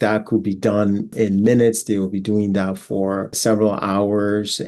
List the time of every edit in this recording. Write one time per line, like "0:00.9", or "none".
0:01.1
0:03.4